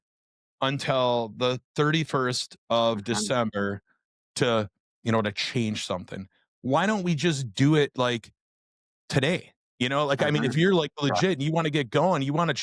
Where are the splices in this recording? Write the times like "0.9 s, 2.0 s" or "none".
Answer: none